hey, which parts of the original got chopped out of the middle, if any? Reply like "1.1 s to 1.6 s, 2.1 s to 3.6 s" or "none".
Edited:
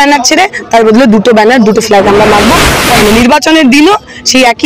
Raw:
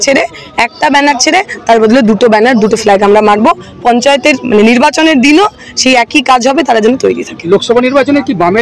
3.9 s to 4.4 s